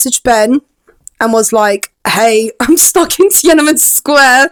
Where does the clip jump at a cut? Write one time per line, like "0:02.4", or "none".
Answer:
none